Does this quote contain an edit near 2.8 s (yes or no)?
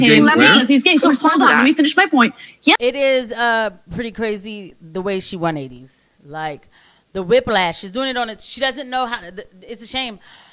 yes